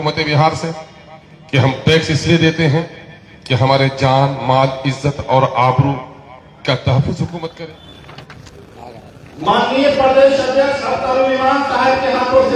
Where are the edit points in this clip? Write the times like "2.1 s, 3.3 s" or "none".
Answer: 7.6 s

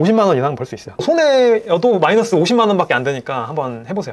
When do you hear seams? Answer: 1.0 s

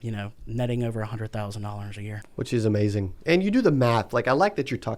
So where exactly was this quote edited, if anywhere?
2.2 s

